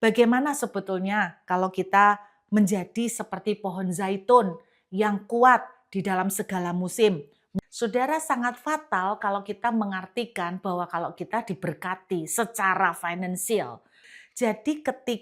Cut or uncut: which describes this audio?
cut